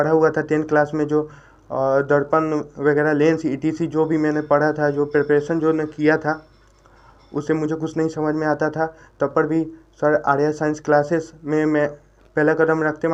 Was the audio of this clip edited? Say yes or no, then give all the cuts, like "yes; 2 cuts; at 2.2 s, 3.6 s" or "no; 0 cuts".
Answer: no; 0 cuts